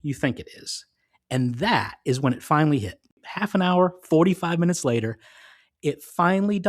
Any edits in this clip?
yes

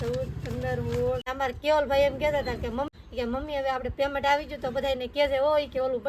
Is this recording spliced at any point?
yes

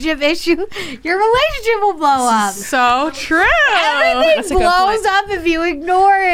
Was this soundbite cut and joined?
no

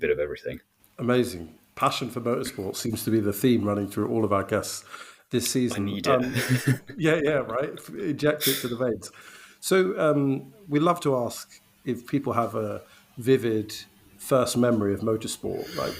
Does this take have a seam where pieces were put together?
no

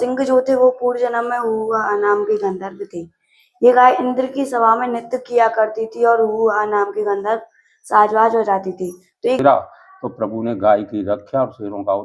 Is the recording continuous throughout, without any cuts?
no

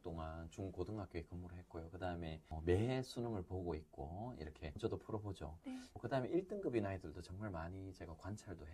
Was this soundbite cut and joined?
yes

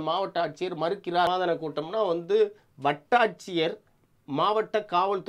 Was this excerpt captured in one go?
no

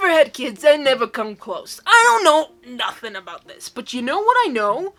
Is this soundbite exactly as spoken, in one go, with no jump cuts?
yes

